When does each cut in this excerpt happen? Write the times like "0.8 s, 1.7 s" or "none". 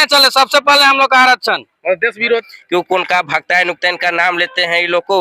2.5 s